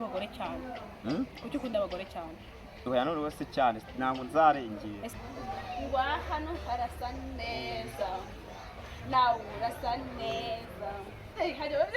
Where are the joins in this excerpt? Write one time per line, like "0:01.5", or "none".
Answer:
0:05.1